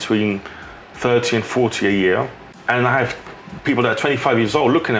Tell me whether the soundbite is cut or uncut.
cut